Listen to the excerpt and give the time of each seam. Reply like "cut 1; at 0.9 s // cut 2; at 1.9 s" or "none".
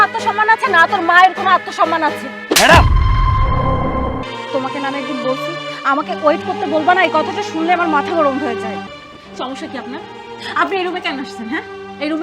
cut 1; at 4.2 s // cut 2; at 9.0 s